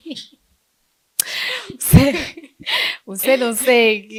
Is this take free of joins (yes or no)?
yes